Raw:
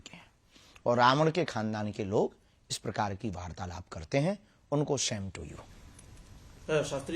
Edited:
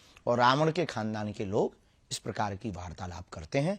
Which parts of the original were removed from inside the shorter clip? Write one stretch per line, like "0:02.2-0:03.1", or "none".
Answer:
none